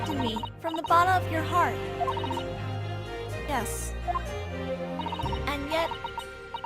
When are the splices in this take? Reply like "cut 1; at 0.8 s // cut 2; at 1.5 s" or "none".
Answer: cut 1; at 3.7 s